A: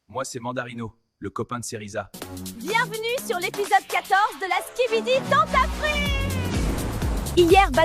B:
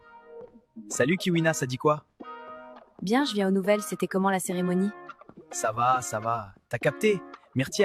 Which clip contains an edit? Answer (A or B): A